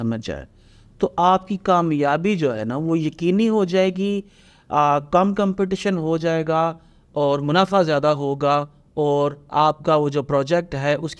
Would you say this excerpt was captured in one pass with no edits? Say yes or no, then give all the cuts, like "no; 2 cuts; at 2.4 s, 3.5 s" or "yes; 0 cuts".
yes; 0 cuts